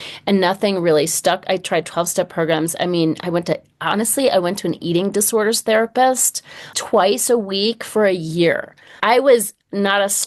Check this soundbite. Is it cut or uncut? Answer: uncut